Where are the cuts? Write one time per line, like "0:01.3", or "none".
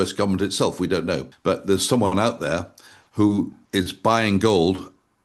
0:01.3
0:03.6